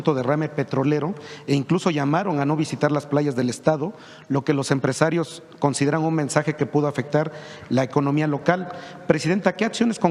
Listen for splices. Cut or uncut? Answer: uncut